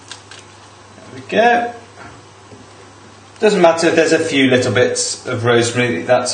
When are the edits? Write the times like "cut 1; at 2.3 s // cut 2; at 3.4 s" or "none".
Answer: cut 1; at 4.8 s

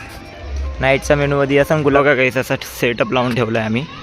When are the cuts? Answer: cut 1; at 2.0 s

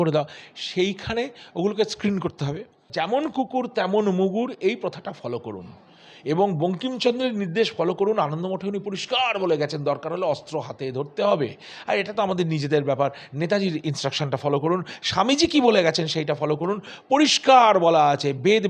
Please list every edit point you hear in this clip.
cut 1; at 2.8 s

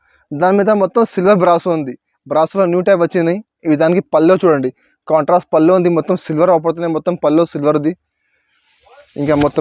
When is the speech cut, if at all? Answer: none

